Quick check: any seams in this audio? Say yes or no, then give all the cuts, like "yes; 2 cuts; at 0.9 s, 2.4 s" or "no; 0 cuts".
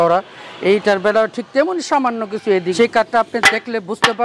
yes; 1 cut; at 2.7 s